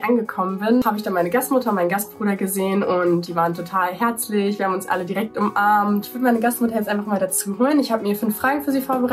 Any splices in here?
yes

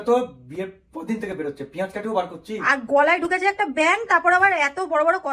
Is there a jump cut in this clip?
no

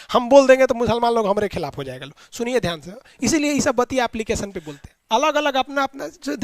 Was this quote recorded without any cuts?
no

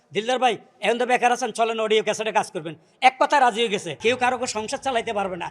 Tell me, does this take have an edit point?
yes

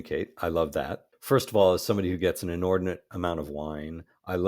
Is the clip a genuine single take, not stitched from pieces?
no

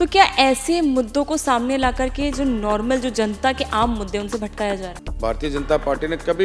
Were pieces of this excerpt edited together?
yes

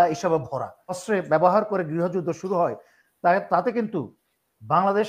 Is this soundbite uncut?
no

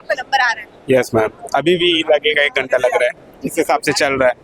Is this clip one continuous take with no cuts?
yes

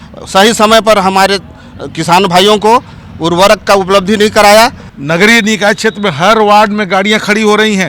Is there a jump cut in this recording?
yes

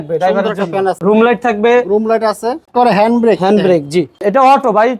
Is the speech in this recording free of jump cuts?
no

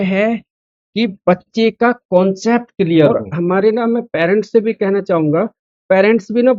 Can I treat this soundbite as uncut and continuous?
no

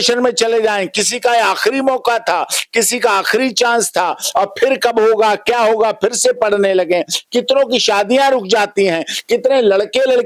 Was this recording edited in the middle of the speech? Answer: no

